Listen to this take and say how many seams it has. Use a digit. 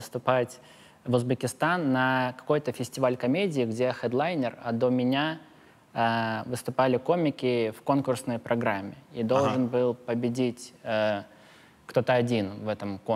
0